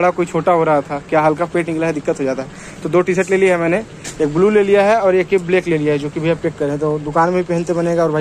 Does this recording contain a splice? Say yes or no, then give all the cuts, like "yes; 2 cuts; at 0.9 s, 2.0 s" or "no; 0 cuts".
no; 0 cuts